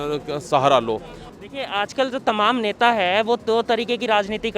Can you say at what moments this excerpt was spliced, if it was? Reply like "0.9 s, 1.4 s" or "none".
1.2 s